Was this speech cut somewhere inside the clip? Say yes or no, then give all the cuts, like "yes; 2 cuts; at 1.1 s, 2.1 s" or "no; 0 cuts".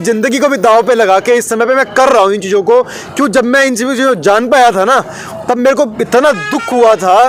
no; 0 cuts